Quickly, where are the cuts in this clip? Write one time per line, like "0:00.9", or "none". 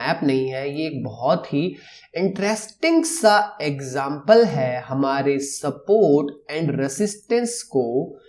none